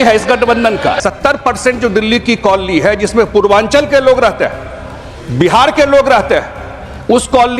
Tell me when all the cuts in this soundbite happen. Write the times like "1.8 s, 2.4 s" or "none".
1.0 s